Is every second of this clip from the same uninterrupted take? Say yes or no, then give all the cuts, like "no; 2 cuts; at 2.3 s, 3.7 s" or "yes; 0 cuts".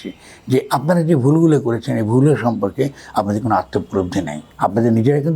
no; 1 cut; at 4.4 s